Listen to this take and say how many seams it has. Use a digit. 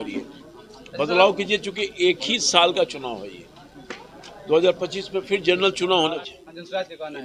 1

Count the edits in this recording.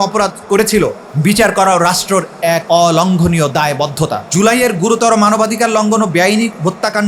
3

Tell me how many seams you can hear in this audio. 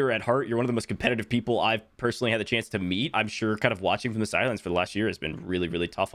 1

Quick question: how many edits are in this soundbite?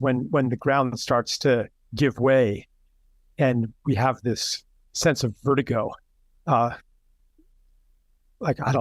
0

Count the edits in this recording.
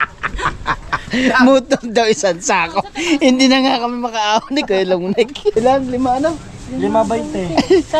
1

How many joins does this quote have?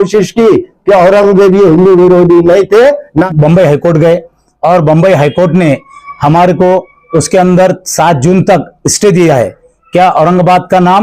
1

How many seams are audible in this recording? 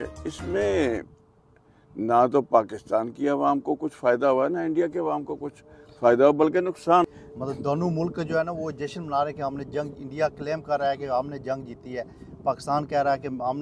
1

